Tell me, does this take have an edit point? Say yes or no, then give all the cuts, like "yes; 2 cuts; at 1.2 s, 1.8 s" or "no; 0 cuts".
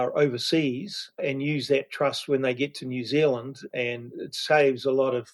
no; 0 cuts